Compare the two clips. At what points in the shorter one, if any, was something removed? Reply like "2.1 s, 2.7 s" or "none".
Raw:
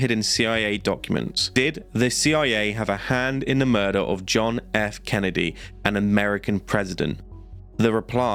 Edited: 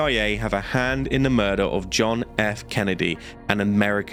none